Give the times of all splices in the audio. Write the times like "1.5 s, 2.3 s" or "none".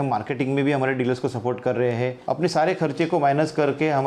2.2 s